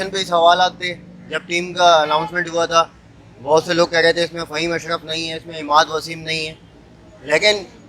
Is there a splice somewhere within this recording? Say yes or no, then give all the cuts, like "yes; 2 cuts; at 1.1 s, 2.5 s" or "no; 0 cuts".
no; 0 cuts